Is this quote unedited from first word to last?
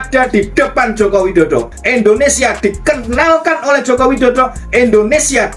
no; 1 cut; at 1.7 s

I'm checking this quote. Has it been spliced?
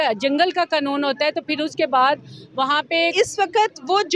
yes; 1 cut; at 3.1 s

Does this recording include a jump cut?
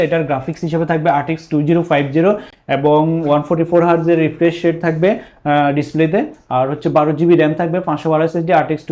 no; 0 cuts

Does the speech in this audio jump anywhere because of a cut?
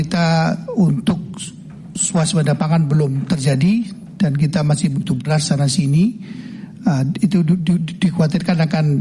no; 0 cuts

